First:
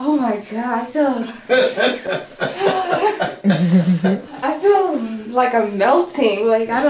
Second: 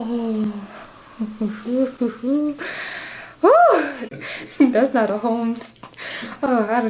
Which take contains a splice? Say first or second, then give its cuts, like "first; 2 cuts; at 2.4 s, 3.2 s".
second; 1 cut; at 4.0 s